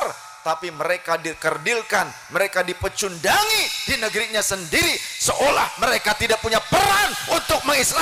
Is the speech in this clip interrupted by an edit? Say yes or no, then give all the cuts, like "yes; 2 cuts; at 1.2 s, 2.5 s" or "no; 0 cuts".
no; 0 cuts